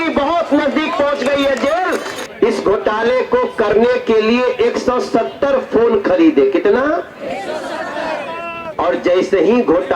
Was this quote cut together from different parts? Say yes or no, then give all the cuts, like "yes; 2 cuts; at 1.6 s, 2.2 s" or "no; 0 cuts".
yes; 1 cut; at 2.2 s